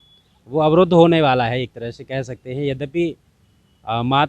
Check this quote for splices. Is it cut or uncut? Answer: uncut